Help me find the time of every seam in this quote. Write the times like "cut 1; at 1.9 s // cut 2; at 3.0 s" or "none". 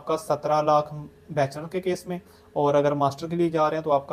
none